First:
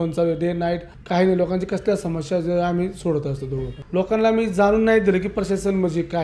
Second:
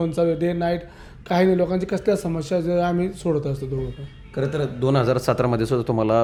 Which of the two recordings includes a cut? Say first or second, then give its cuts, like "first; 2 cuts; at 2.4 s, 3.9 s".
first; 2 cuts; at 0.9 s, 3.7 s